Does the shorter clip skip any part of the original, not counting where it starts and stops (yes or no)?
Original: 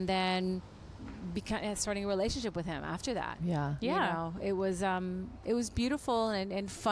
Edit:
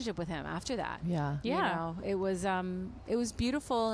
no